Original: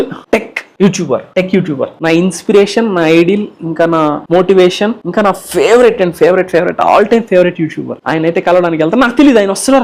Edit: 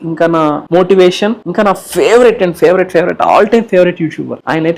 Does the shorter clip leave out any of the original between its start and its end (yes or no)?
no